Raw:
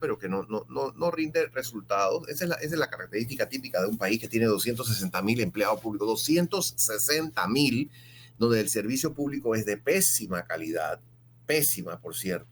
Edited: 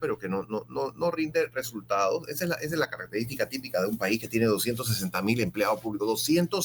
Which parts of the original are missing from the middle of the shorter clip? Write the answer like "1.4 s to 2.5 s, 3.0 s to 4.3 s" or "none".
none